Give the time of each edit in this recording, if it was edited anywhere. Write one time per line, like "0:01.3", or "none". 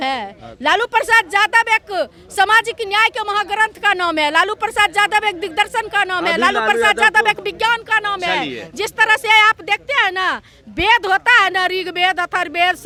none